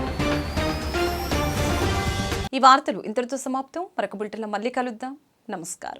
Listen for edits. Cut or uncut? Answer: uncut